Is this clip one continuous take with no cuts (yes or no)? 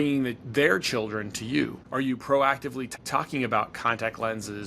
no